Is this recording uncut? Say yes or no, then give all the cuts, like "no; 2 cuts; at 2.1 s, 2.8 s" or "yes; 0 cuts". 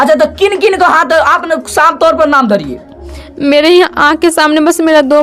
yes; 0 cuts